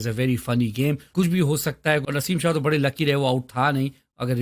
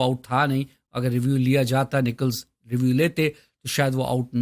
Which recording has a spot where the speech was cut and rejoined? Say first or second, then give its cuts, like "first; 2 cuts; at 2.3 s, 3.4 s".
first; 2 cuts; at 1.0 s, 2.0 s